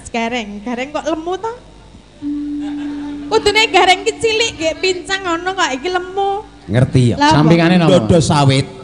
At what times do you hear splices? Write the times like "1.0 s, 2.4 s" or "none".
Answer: 7.1 s